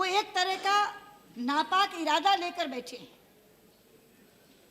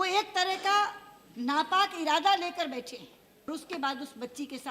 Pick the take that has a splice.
second; 1 cut; at 3.5 s

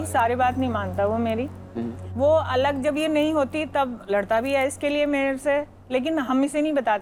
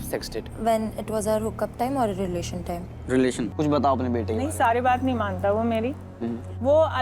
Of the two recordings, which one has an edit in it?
second; 1 cut; at 3.5 s

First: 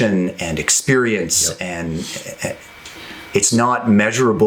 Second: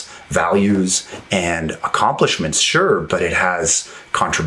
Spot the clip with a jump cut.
second; 1 cut; at 3.0 s

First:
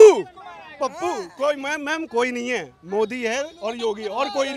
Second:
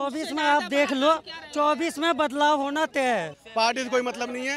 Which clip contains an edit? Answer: second; 1 cut; at 3.3 s

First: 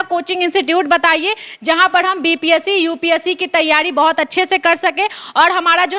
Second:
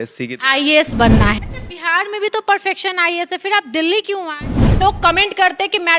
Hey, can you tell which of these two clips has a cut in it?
second; 2 cuts; at 1.4 s, 4.8 s

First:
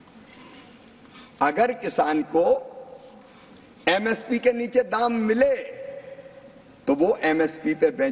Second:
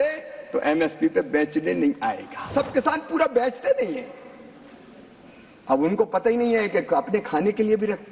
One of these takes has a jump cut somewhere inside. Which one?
second; 1 cut; at 2.5 s

